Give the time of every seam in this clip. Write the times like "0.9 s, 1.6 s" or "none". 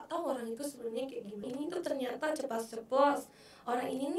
1.5 s